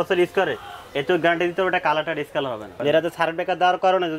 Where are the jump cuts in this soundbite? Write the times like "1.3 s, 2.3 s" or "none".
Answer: 2.7 s